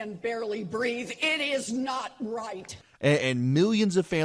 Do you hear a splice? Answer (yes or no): no